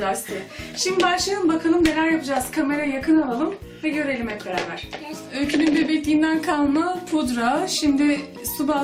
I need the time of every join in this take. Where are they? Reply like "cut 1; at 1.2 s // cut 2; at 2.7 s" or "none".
cut 1; at 7.0 s